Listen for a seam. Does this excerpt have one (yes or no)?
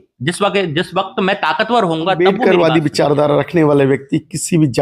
yes